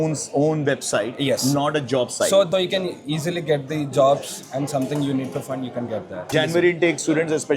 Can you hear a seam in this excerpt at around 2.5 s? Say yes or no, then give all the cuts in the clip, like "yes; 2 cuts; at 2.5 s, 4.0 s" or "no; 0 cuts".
yes; 2 cuts; at 2.5 s, 6.3 s